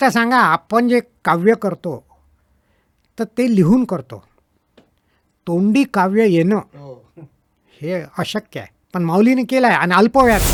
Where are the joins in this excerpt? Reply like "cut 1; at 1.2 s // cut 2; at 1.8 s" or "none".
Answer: none